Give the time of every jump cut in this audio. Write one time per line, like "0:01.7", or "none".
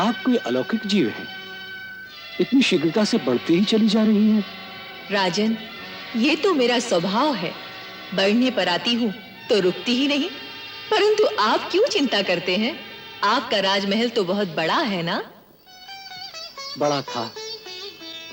none